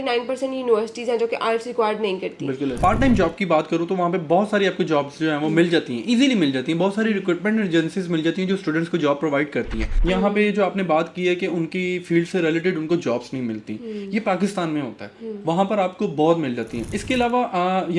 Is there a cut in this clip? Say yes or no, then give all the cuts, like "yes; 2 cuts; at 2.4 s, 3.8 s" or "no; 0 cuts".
yes; 3 cuts; at 2.8 s, 9.9 s, 16.9 s